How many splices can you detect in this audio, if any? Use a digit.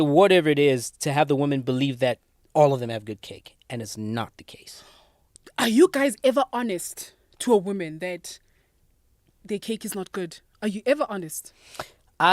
0